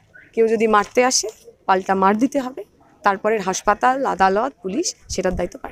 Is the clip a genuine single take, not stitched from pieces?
yes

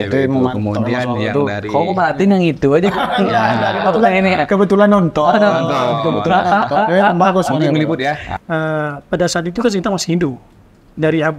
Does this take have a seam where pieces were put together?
yes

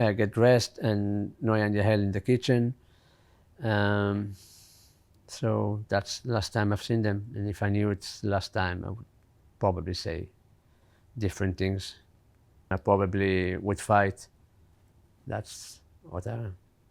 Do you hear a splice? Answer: no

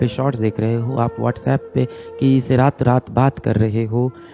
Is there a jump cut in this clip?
no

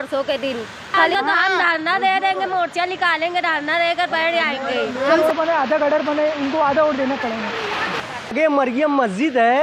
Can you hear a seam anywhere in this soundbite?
yes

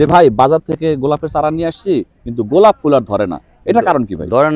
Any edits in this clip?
no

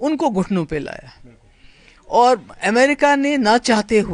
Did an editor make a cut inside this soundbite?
no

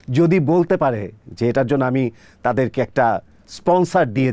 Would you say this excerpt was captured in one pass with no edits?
yes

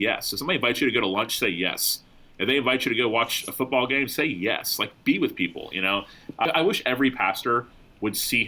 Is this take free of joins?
no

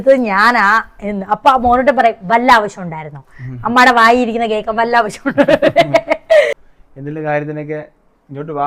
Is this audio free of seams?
no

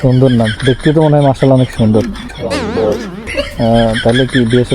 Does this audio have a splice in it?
yes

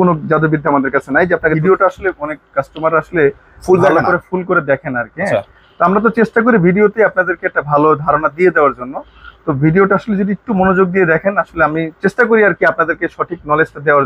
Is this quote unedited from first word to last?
no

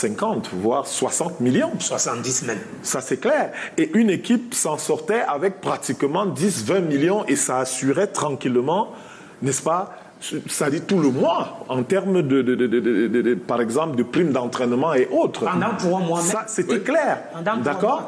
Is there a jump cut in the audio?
no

